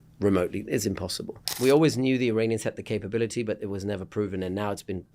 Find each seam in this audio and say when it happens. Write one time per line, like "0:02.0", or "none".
0:01.4

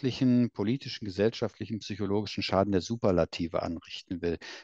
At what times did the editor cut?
none

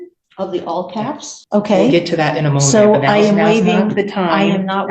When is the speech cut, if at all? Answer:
0:01.4

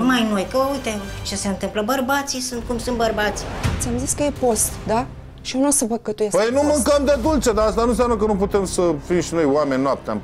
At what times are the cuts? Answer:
0:03.8

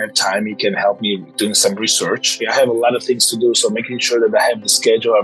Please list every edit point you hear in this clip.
0:02.5

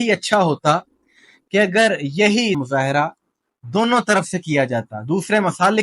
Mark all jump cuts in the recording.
0:02.6

